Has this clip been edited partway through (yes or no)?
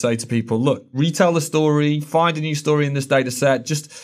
yes